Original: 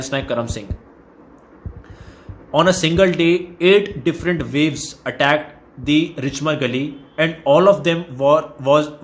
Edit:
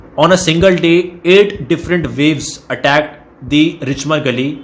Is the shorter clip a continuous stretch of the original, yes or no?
yes